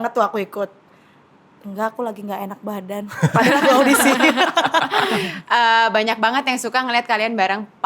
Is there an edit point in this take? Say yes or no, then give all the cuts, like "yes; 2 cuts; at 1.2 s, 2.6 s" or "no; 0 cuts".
yes; 1 cut; at 5.1 s